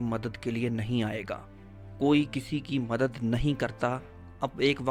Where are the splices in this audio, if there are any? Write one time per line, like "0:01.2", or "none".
none